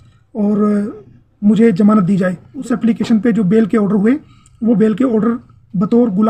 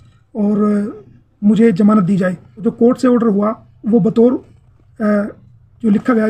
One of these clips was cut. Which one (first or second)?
first